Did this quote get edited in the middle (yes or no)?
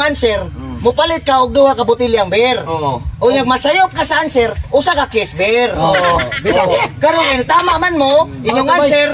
no